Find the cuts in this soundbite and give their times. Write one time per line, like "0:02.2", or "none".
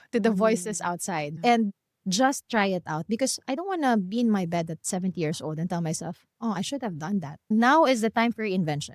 0:01.3
0:07.5